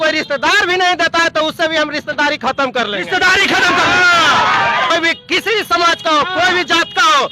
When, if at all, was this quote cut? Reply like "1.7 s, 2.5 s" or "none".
4.9 s